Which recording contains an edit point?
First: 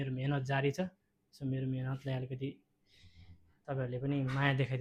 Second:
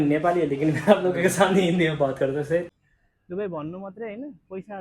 second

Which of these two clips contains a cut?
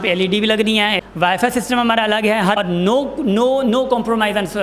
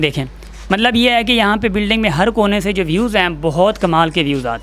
first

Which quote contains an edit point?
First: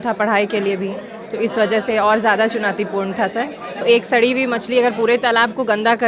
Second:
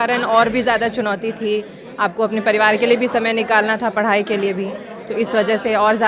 first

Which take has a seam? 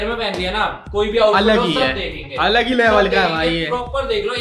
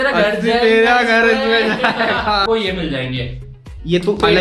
second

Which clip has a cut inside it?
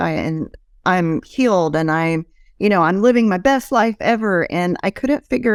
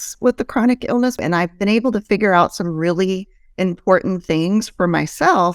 second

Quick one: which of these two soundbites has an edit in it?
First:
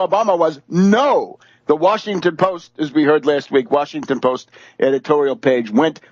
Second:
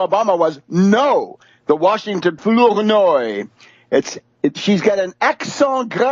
first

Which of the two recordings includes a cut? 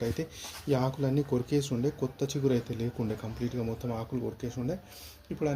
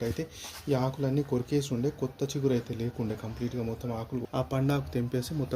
second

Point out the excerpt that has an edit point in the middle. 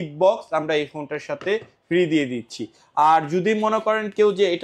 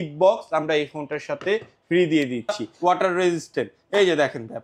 second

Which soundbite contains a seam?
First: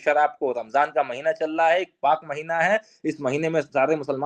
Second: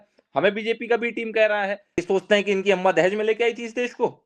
second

